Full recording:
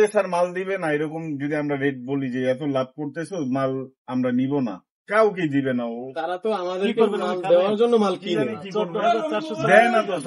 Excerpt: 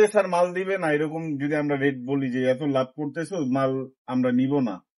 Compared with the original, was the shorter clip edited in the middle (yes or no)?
no